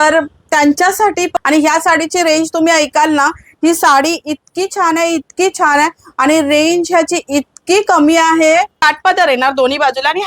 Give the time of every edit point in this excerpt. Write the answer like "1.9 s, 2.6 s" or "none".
1.3 s, 8.8 s